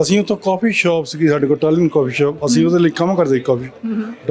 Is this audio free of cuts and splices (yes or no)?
yes